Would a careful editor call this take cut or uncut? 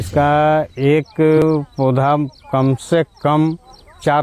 cut